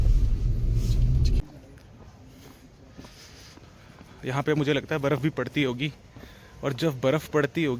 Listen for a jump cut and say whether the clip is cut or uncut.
cut